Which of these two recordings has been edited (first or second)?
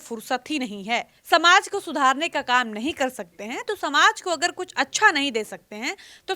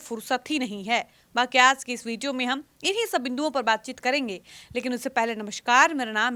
first